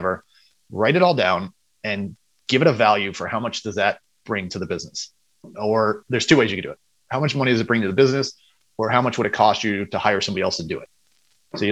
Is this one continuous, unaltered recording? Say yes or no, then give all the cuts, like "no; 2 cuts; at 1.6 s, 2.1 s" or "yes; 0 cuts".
yes; 0 cuts